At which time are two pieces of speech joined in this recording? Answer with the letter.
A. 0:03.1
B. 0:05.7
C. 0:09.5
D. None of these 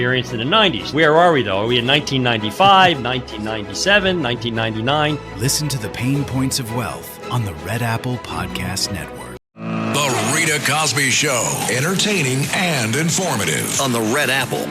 C